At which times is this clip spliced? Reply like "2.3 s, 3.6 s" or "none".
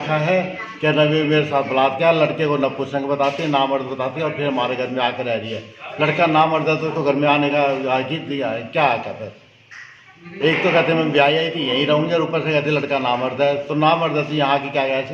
none